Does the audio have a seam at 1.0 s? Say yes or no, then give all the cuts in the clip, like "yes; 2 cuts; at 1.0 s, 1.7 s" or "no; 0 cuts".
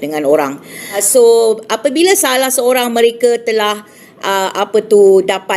yes; 1 cut; at 1.0 s